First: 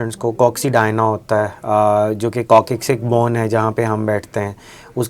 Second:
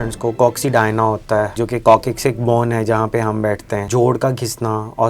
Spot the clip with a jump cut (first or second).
second